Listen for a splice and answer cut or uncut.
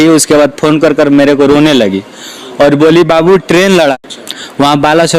cut